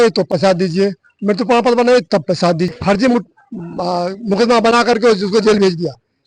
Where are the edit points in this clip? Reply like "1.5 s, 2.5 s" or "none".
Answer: 2.7 s